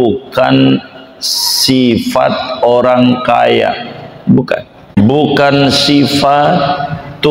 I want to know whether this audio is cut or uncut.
cut